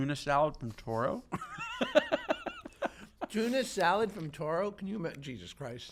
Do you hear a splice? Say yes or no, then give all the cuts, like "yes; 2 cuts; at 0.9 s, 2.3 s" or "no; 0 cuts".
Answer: no; 0 cuts